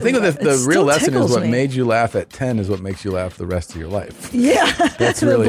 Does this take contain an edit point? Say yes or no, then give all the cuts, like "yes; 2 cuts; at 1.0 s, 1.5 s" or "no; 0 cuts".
no; 0 cuts